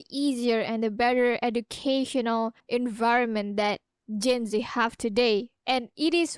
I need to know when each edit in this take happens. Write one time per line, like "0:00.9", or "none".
0:02.6

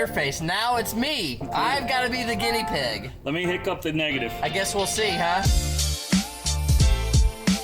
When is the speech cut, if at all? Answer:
0:05.4

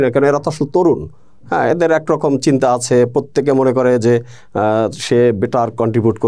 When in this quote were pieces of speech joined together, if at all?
none

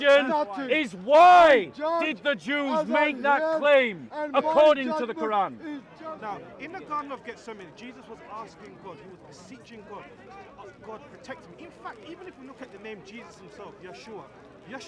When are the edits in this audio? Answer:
0:05.9

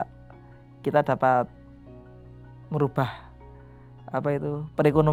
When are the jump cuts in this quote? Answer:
none

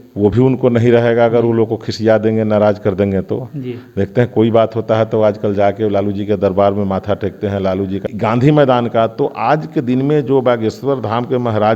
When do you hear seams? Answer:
0:08.1

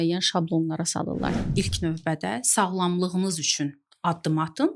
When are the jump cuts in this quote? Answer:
0:01.4

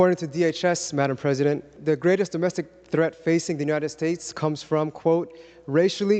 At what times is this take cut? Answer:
0:01.7

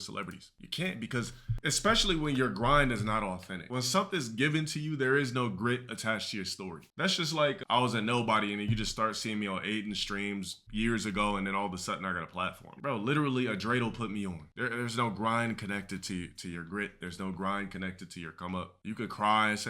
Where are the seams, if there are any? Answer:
0:01.4
0:03.6
0:12.7
0:14.5

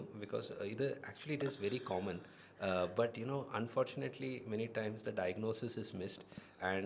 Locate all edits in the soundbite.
none

